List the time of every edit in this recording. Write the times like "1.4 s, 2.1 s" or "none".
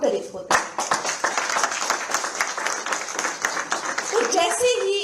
none